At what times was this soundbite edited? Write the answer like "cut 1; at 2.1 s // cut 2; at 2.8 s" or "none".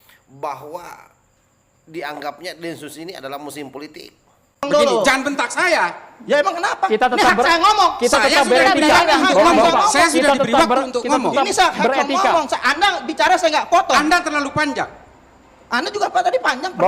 cut 1; at 4.7 s